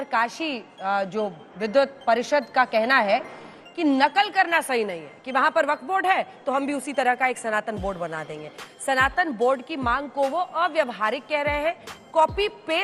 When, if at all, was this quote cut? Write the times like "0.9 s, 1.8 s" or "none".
none